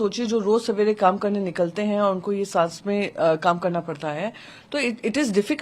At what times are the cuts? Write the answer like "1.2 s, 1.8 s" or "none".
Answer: none